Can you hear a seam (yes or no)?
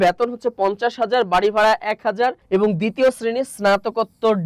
yes